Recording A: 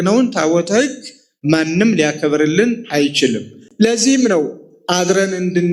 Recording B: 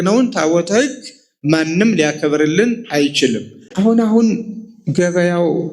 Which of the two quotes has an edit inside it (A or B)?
B